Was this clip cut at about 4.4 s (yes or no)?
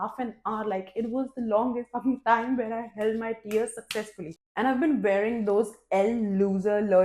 yes